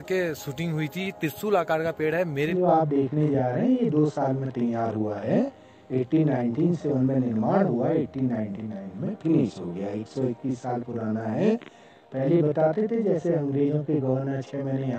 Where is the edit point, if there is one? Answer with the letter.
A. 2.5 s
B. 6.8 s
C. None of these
A